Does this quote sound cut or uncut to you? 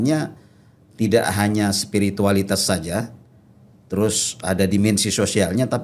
uncut